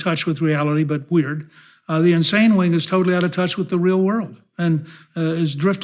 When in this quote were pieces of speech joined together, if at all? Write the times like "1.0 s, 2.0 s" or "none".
none